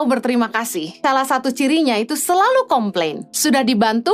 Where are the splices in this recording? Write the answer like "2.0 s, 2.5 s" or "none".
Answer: 0.9 s, 3.2 s